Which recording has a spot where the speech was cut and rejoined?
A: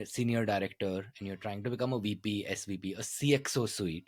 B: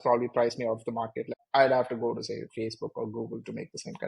B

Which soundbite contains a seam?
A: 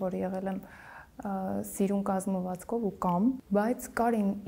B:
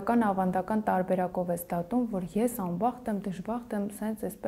A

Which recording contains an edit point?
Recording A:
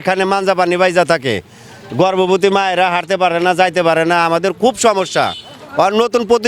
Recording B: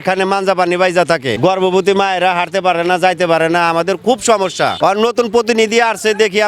B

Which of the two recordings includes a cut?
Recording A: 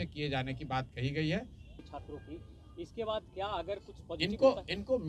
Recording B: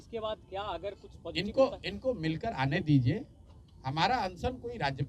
A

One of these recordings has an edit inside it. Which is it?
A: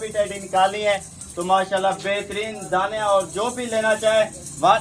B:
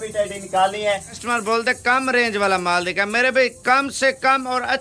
B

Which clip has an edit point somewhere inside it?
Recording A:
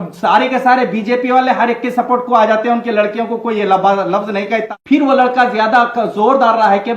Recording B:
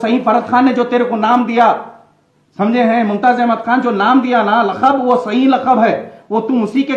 A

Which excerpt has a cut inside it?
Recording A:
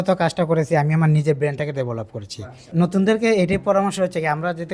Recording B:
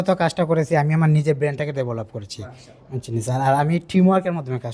A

